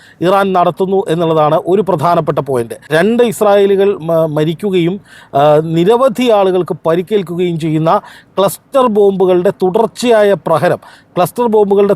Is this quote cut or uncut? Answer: cut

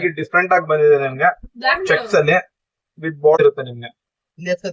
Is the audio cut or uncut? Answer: cut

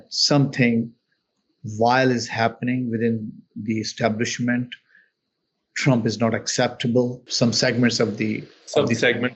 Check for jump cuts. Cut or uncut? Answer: cut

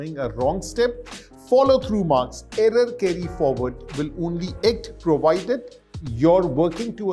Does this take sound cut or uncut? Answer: uncut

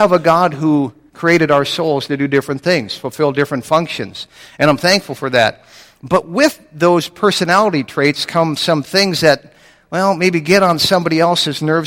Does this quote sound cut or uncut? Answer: cut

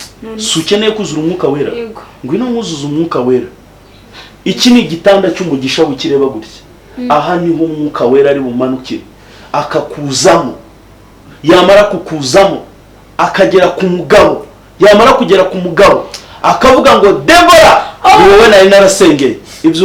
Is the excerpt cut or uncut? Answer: uncut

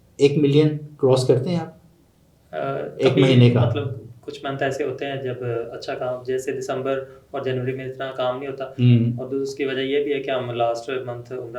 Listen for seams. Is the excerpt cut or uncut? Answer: uncut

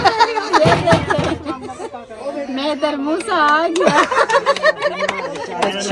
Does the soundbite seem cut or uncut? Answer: uncut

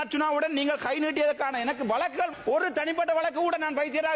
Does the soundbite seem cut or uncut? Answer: cut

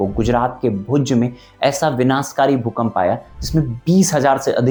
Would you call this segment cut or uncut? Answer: uncut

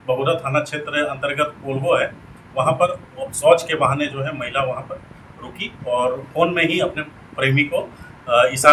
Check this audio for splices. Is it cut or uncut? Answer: uncut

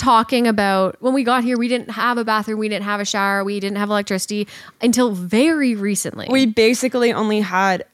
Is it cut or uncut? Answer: uncut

